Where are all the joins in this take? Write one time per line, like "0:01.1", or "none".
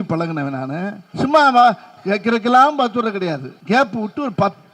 0:01.0
0:03.5

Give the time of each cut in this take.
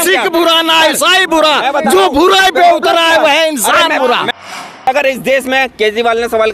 0:04.5

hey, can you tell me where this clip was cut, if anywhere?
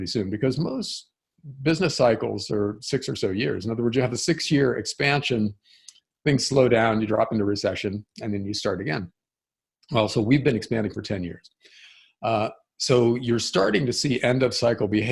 none

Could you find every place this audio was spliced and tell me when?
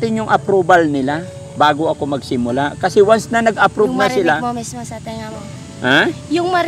none

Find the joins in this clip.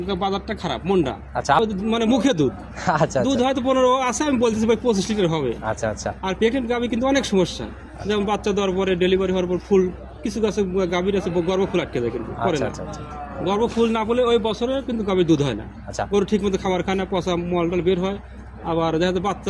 0:01.6

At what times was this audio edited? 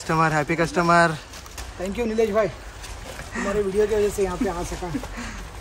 none

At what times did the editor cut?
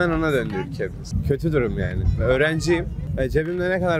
none

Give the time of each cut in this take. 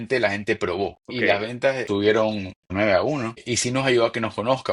0:01.0
0:01.9
0:02.7
0:03.4

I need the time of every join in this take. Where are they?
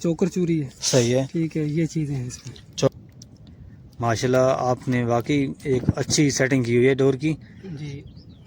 0:02.9

